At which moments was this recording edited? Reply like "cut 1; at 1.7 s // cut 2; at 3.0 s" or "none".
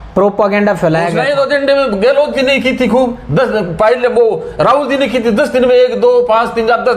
cut 1; at 1.2 s